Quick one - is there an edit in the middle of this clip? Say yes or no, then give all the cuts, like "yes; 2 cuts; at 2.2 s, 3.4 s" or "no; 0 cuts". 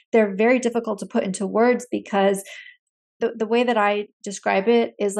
yes; 1 cut; at 3.2 s